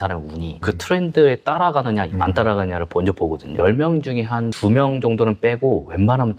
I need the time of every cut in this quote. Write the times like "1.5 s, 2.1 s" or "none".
3.5 s